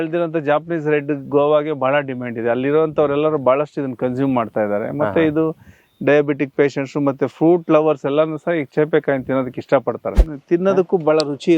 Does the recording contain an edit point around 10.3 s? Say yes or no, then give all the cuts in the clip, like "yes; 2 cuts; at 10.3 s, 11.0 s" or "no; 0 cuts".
yes; 1 cut; at 10.3 s